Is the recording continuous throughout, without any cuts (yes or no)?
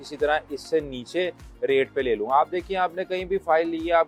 yes